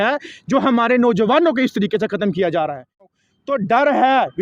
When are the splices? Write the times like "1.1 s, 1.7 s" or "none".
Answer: 3.1 s